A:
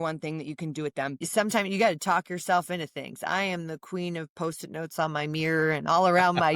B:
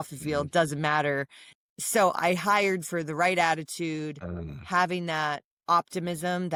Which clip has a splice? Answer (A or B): A